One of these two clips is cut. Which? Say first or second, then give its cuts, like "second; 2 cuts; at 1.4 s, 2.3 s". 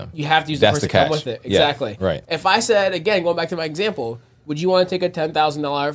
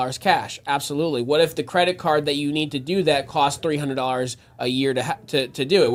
first; 1 cut; at 2.2 s